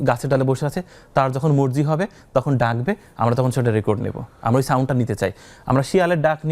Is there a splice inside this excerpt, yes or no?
no